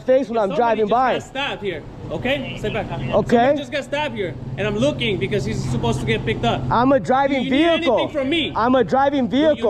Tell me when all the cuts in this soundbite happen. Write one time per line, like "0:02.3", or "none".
none